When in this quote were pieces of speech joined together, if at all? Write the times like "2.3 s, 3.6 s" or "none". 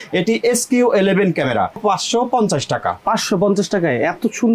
1.8 s